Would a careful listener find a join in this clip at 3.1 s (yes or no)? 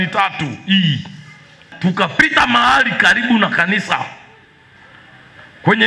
no